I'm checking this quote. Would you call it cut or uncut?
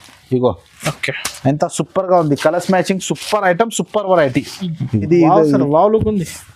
cut